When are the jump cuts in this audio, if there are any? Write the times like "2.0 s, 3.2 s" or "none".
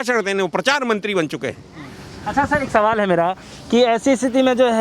none